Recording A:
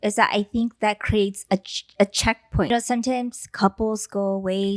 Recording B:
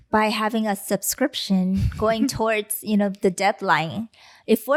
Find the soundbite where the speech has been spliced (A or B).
A